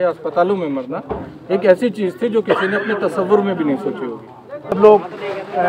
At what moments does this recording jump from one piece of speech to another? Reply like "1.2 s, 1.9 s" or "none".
4.8 s

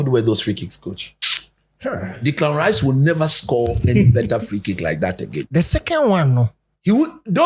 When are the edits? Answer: none

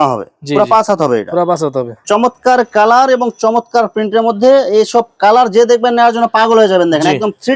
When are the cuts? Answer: 1.9 s

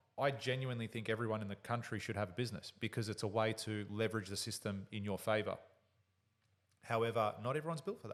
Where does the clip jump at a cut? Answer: none

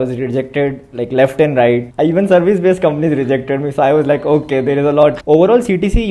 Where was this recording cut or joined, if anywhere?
1.9 s, 5.2 s

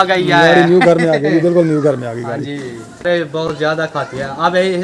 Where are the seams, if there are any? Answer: 3.0 s

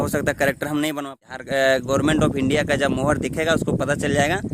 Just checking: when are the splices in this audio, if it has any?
1.3 s

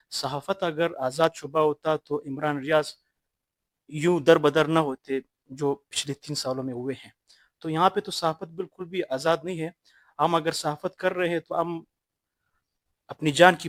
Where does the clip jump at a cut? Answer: none

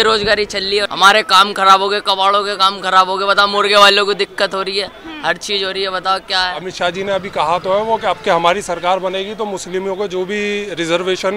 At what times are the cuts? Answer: 0.9 s, 6.7 s

